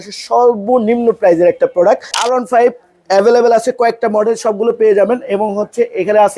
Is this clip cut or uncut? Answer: cut